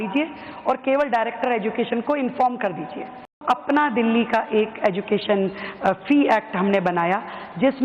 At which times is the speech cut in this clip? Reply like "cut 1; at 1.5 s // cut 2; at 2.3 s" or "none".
cut 1; at 3.4 s